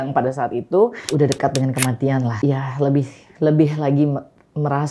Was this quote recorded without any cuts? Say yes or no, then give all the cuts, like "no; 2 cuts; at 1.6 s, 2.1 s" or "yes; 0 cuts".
no; 2 cuts; at 1.1 s, 2.3 s